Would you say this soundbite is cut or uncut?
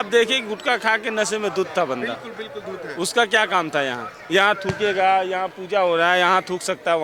uncut